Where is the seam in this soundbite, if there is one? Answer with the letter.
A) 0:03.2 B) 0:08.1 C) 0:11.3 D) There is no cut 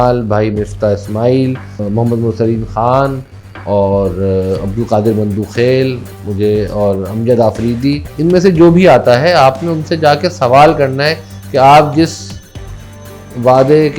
B